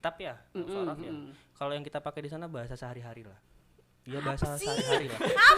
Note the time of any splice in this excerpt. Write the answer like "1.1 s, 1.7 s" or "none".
3.4 s